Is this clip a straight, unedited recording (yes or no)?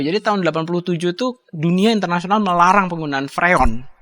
no